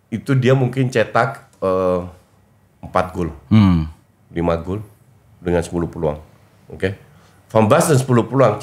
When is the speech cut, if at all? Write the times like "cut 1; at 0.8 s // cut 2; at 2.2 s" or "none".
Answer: none